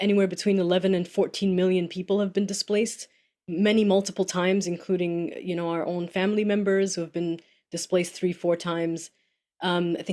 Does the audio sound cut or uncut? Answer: uncut